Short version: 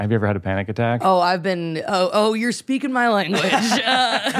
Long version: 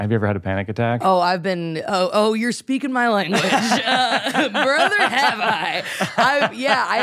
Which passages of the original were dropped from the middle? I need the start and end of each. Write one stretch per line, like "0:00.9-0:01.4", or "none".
none